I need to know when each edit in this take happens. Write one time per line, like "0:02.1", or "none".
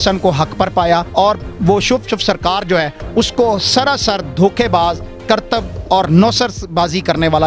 0:01.1